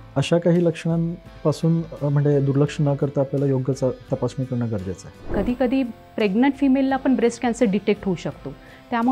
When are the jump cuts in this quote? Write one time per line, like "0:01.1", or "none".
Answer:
0:05.1